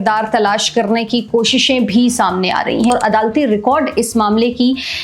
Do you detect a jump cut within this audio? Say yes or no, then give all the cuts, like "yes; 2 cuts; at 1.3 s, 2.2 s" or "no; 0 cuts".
yes; 1 cut; at 2.9 s